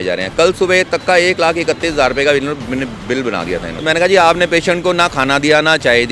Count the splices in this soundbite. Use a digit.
1